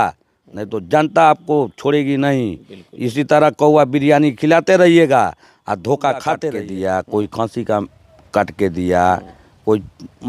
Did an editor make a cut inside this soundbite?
yes; 1 cut; at 6.6 s

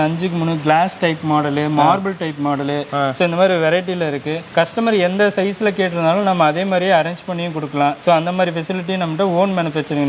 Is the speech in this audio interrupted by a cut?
no; 0 cuts

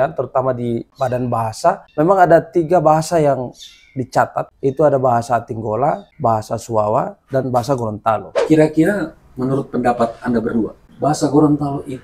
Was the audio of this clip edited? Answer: yes; 5 cuts; at 0.9 s, 1.9 s, 4.5 s, 6.1 s, 8.3 s

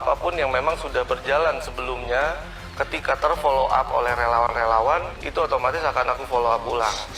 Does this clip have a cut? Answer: no; 0 cuts

